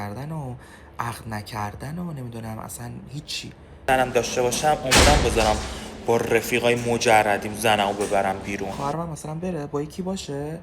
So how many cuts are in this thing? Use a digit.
2